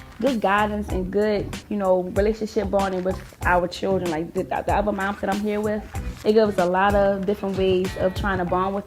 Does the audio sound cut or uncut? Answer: uncut